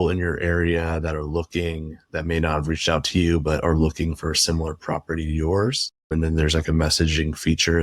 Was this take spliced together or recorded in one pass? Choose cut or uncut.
uncut